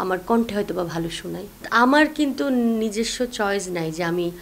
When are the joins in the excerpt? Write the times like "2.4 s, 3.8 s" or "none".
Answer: 1.5 s